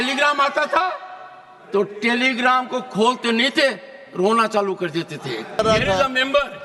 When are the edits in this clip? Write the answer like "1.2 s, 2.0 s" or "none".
5.6 s